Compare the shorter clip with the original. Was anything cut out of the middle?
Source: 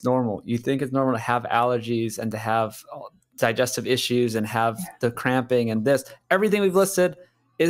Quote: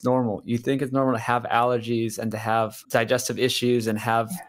yes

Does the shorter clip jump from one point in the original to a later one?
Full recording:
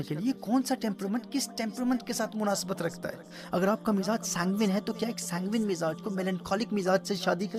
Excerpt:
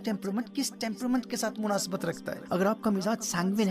yes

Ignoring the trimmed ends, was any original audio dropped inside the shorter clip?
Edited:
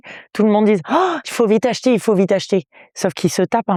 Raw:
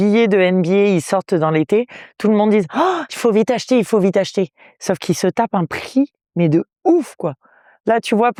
no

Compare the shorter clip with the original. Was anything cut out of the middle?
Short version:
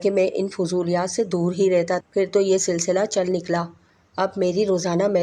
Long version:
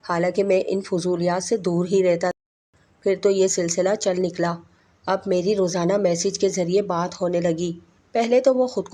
yes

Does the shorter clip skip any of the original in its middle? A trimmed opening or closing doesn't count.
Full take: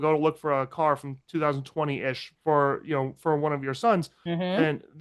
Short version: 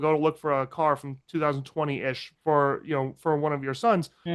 no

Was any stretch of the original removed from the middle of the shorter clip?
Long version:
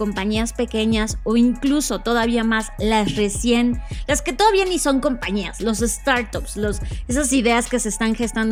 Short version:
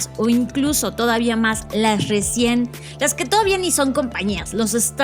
no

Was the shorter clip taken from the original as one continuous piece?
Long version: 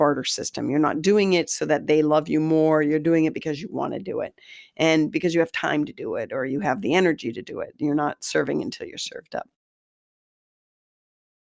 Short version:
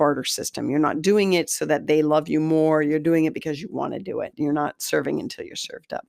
no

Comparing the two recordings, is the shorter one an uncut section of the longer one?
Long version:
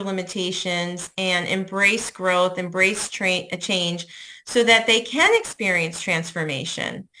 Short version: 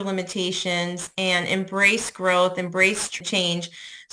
no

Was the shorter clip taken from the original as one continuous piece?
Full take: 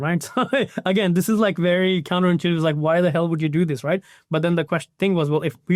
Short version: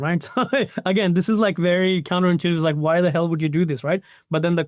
yes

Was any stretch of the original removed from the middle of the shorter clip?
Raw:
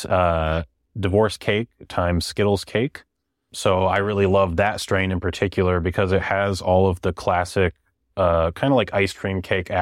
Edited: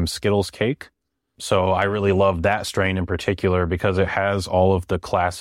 no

